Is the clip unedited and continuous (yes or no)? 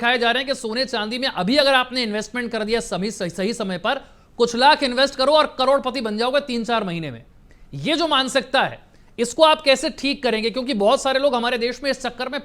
yes